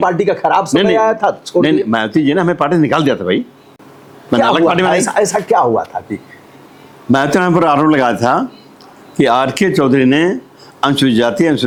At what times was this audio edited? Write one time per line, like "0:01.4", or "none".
none